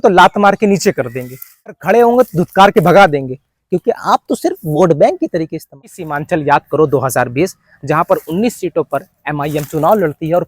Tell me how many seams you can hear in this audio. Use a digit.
2